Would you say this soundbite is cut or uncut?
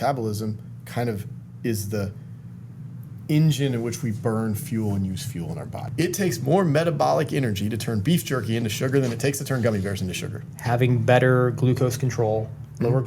cut